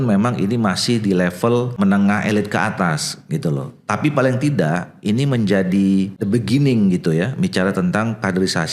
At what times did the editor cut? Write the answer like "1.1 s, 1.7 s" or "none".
1.8 s, 6.2 s